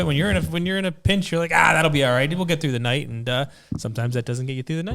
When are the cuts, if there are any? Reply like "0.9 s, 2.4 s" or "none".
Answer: none